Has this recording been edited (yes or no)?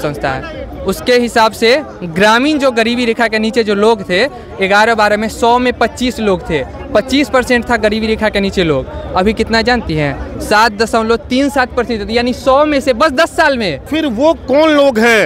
yes